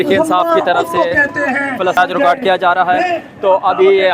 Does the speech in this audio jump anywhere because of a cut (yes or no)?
yes